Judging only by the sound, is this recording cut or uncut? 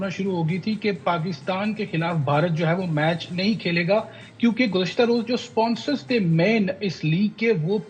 uncut